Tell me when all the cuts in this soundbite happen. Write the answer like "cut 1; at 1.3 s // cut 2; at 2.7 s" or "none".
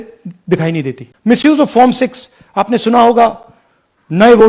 cut 1; at 1.0 s